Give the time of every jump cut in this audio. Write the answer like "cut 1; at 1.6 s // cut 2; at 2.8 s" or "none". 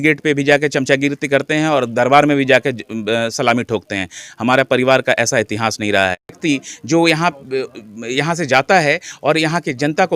cut 1; at 6.4 s